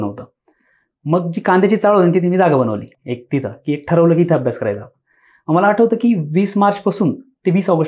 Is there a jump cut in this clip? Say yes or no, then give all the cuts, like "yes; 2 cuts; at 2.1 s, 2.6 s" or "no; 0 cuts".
no; 0 cuts